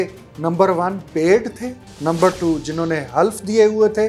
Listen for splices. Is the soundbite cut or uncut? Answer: cut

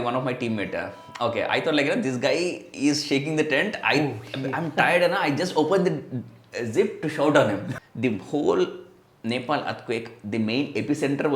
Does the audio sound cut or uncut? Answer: cut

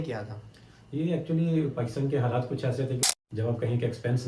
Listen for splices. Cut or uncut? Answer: cut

